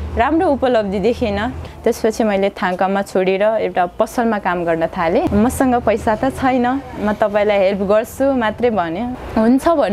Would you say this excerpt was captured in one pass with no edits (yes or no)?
no